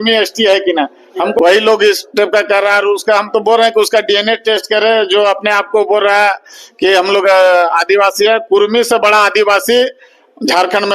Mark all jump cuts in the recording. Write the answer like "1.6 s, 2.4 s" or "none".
1.4 s